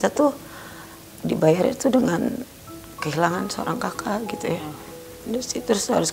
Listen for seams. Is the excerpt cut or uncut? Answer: cut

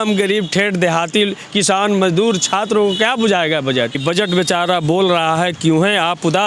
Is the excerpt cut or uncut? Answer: cut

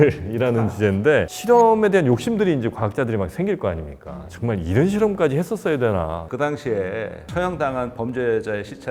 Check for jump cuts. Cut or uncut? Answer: cut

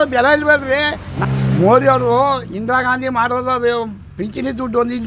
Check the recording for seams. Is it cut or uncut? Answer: cut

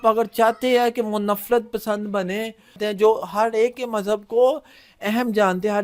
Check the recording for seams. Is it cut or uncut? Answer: cut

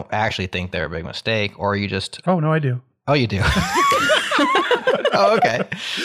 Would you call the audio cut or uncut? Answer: uncut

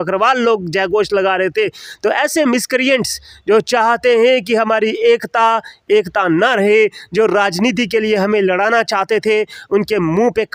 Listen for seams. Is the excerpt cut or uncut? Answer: uncut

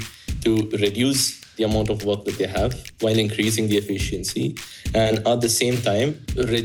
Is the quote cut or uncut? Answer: uncut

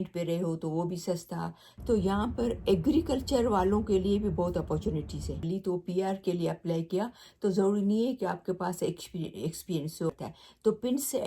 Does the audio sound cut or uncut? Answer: cut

